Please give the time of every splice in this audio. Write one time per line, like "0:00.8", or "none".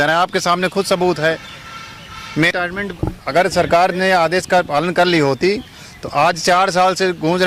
none